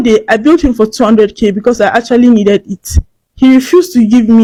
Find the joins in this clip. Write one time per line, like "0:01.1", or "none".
none